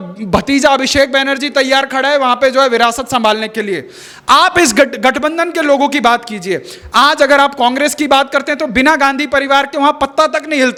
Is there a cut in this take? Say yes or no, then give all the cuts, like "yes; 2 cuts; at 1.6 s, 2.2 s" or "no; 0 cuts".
no; 0 cuts